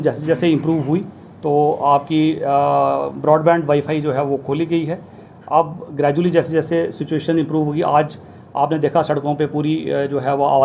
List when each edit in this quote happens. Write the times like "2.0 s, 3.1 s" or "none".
none